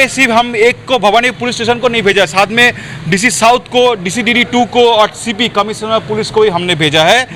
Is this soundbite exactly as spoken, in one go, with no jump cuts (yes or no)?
yes